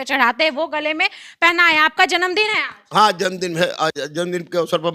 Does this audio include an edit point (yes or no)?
no